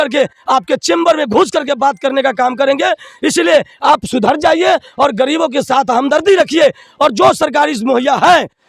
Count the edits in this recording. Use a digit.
0